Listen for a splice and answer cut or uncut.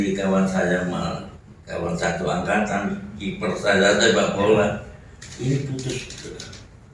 uncut